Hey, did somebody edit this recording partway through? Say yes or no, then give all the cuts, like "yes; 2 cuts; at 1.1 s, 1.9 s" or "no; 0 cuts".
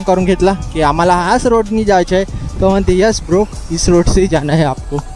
no; 0 cuts